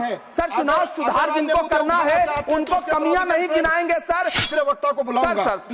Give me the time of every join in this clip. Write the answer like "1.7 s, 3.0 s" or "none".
4.4 s